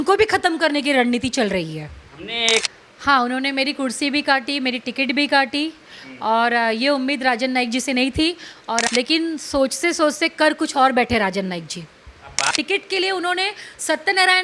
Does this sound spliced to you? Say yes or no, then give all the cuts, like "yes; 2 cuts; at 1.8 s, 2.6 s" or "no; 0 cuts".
yes; 3 cuts; at 2.7 s, 8.8 s, 12.5 s